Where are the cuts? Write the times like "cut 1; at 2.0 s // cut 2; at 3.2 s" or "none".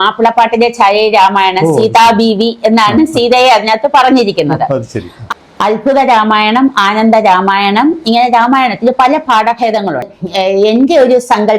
cut 1; at 10.0 s